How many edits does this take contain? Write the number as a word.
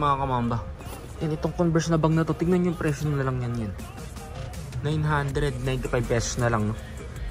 zero